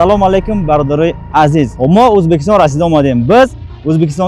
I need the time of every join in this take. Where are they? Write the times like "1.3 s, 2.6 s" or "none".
1.7 s